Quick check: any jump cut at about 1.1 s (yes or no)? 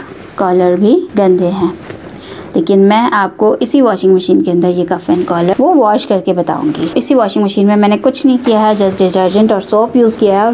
yes